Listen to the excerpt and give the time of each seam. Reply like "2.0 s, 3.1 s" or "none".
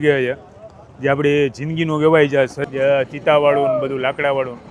2.6 s